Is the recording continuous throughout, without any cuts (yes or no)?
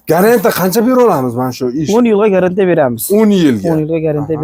yes